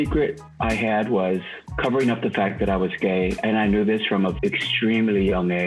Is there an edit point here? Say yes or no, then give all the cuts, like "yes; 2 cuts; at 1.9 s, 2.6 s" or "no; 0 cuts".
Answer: yes; 1 cut; at 4.3 s